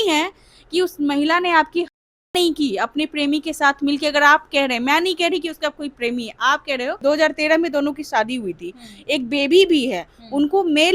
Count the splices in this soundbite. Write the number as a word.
one